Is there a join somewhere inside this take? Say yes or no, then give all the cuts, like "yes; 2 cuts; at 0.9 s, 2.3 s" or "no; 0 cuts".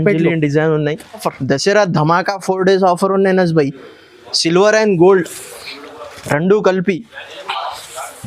yes; 1 cut; at 1.3 s